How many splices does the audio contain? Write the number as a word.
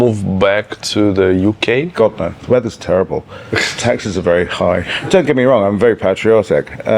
two